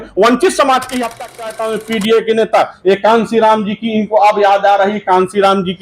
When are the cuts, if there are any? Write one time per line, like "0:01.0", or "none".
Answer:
0:01.4